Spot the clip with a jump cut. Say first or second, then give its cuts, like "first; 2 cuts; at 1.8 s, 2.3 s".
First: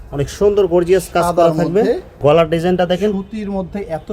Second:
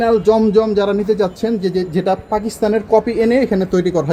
first; 1 cut; at 2.1 s